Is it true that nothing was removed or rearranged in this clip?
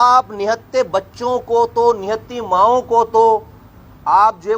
yes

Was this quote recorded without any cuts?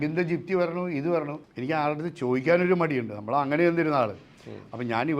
no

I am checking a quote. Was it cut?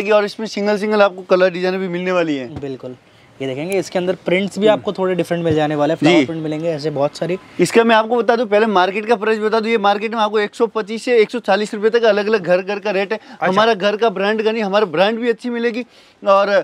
no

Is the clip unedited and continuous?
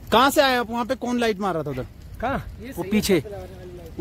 yes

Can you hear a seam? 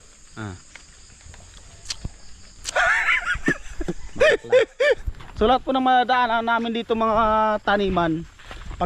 yes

